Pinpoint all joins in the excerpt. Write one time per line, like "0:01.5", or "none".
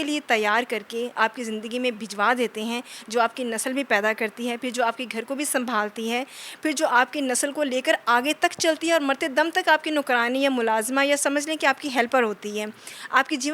none